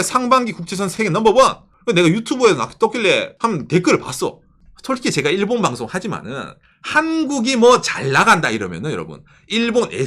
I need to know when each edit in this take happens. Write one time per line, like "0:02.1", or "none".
0:00.9
0:01.7
0:03.3